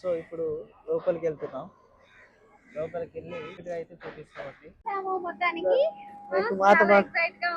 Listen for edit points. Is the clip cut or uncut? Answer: cut